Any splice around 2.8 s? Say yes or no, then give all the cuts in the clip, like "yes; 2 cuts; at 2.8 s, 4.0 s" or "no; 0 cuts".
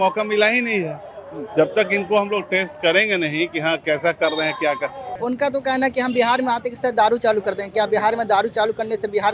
no; 1 cut; at 5.0 s